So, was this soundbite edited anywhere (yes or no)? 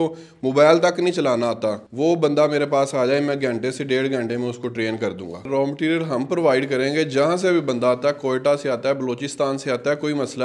yes